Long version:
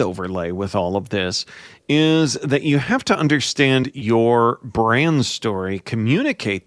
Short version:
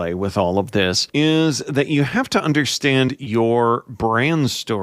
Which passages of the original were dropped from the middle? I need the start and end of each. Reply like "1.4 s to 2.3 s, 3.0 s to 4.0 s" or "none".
1.4 s to 1.8 s